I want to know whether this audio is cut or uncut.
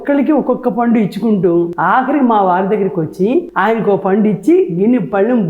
cut